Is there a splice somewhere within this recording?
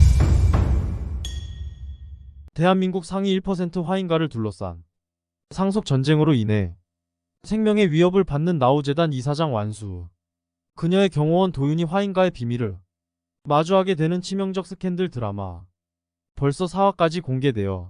yes; 1 cut; at 2.0 s

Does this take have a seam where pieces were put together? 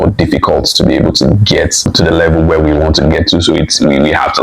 yes; 1 cut; at 1.8 s

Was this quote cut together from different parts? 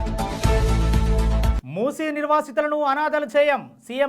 yes; 1 cut; at 1.6 s

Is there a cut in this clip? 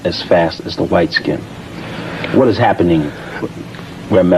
no; 0 cuts

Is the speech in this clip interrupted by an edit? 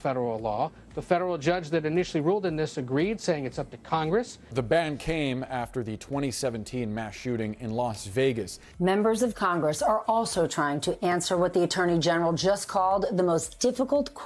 yes; 2 cuts; at 4.4 s, 8.7 s

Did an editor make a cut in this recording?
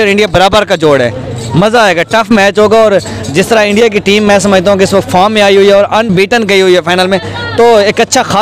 no; 0 cuts

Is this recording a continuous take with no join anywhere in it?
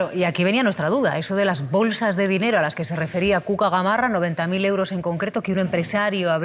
yes; 0 cuts

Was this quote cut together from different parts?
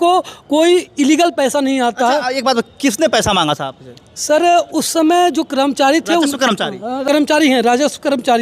yes; 1 cut; at 7.0 s

